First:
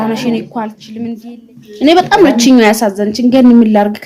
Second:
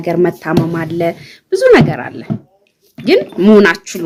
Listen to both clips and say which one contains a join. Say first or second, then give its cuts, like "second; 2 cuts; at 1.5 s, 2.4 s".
first; 1 cut; at 1.2 s